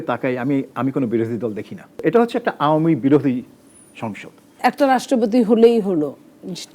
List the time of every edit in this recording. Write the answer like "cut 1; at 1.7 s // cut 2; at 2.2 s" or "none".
cut 1; at 2.0 s // cut 2; at 4.5 s